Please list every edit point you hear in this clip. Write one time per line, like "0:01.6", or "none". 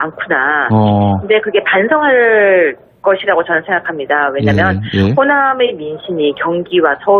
0:02.4